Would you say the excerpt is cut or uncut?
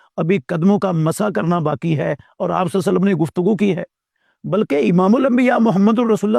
uncut